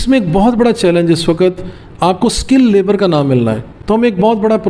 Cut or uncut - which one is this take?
cut